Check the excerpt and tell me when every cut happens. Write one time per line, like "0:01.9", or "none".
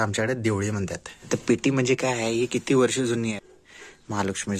0:01.1
0:03.4